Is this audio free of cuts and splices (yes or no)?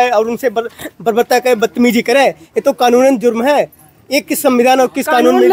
yes